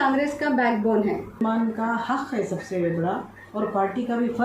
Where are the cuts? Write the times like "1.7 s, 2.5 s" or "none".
1.4 s